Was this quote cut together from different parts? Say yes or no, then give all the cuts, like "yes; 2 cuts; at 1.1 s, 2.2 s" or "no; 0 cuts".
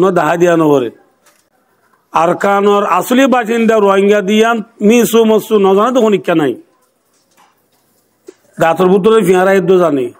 no; 0 cuts